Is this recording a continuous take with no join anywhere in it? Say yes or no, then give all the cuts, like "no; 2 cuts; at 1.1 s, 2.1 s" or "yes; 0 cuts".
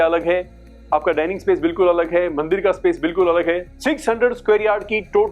no; 1 cut; at 3.7 s